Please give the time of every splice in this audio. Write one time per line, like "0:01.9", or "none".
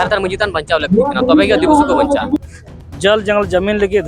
0:02.5